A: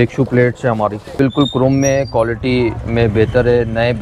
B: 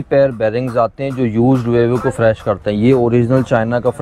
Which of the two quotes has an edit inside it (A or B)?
A